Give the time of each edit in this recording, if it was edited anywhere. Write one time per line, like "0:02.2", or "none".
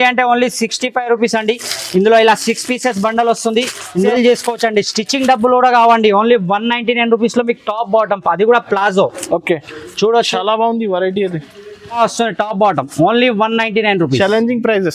0:03.9
0:12.0